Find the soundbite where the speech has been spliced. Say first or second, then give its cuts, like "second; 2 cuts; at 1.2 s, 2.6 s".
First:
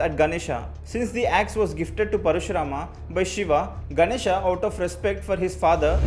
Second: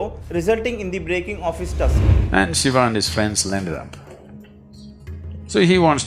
second; 1 cut; at 2.0 s